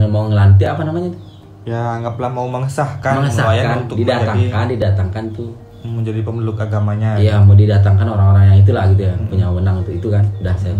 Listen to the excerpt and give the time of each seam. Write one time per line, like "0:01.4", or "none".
none